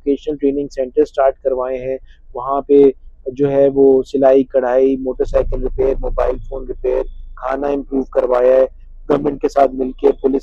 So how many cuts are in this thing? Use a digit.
0